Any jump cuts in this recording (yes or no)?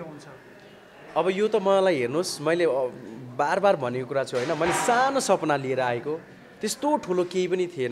no